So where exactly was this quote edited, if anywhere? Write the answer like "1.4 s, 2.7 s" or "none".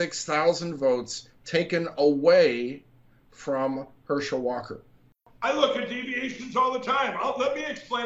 5.3 s